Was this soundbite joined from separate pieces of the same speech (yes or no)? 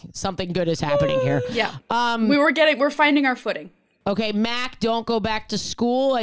no